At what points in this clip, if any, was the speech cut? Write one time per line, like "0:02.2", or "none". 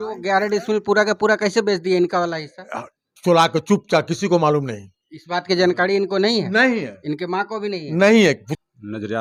none